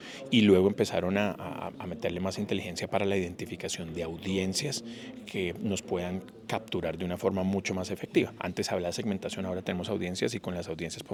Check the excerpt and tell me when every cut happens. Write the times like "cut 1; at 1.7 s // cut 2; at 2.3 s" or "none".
none